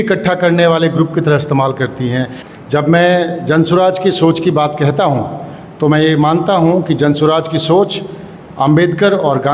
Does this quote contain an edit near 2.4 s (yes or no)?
yes